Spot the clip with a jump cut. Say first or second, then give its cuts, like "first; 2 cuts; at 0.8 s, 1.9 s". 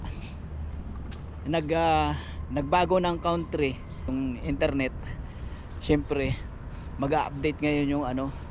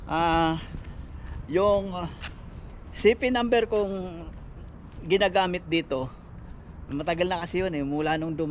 first; 1 cut; at 4.1 s